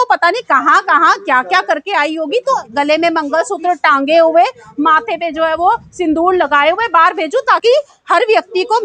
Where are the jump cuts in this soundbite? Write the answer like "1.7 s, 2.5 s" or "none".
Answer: 2.6 s